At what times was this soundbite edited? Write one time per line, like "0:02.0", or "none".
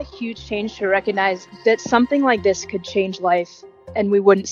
0:01.4